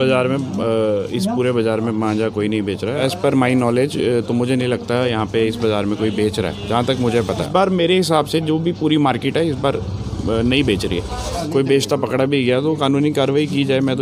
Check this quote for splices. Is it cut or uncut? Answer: cut